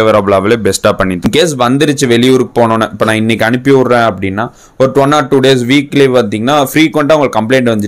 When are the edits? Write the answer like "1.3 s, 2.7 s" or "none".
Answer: 1.3 s